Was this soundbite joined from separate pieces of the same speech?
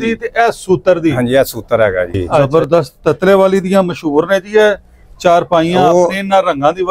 yes; 1 cut; at 2.5 s

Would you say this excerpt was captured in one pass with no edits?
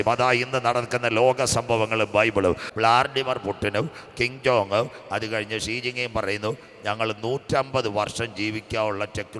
no; 1 cut; at 2.7 s

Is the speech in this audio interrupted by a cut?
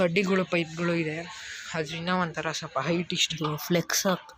yes; 1 cut; at 3.3 s

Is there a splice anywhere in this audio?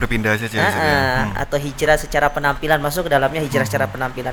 no; 0 cuts

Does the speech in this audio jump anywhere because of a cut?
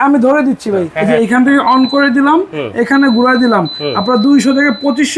yes; 1 cut; at 1.0 s

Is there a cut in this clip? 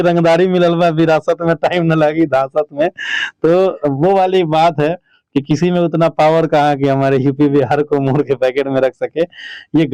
no; 0 cuts

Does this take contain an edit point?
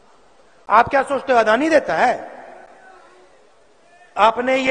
no; 0 cuts

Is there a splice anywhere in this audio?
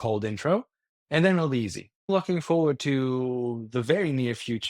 yes; 1 cut; at 2.1 s

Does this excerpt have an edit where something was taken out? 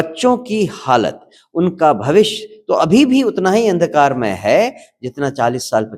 no; 0 cuts

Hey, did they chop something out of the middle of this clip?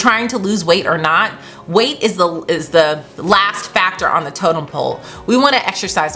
no; 0 cuts

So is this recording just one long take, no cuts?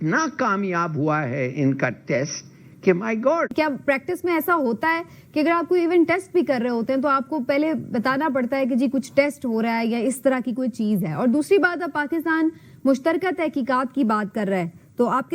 yes; 0 cuts

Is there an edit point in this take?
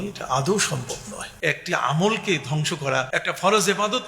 yes; 2 cuts; at 1.2 s, 3.1 s

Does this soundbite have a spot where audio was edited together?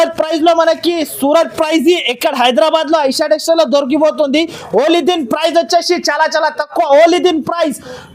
no; 0 cuts

